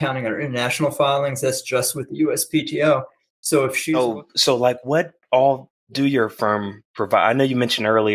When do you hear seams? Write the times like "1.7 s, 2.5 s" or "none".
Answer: 3.8 s